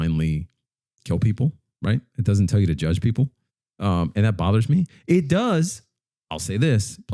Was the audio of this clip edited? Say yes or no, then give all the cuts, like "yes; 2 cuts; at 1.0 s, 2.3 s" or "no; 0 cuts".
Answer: no; 0 cuts